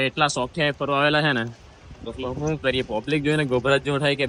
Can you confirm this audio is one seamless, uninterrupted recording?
yes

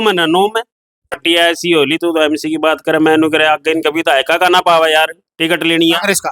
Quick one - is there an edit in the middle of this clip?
yes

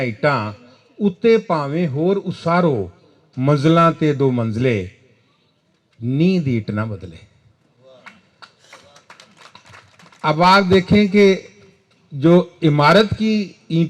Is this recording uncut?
yes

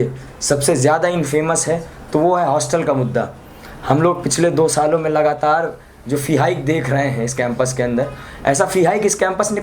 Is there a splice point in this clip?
no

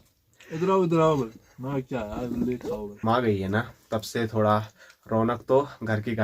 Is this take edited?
yes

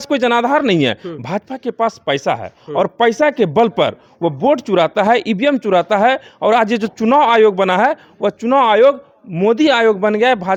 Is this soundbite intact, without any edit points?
yes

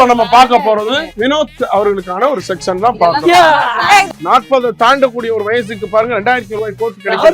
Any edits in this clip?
yes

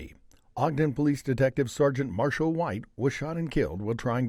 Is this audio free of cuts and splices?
yes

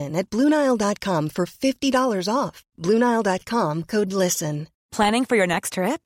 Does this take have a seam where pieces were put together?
no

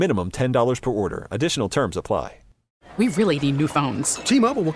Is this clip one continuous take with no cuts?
no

